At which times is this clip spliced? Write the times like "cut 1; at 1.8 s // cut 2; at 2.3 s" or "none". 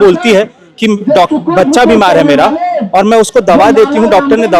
none

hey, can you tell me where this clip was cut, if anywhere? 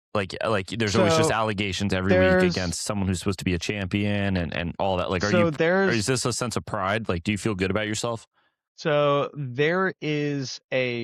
none

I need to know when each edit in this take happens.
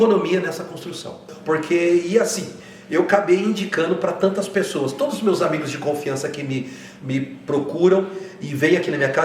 cut 1; at 1.3 s

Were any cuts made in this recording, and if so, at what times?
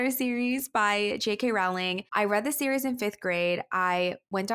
cut 1; at 2.0 s

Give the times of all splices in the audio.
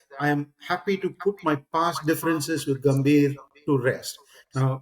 none

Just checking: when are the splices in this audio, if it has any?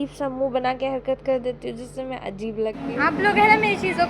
cut 1; at 2.9 s

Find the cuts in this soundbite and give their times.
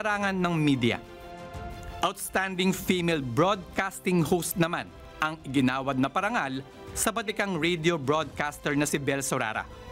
none

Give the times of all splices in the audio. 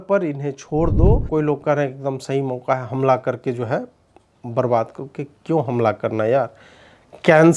cut 1; at 1.2 s

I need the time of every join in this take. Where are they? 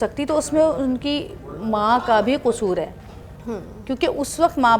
none

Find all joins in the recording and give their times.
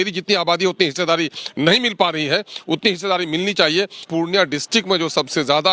cut 1; at 4.1 s

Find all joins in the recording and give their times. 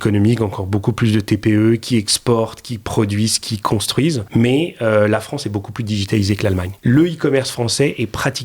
cut 1; at 4.2 s // cut 2; at 6.7 s

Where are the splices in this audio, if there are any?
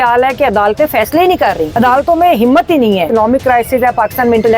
cut 1; at 1.7 s // cut 2; at 3.1 s

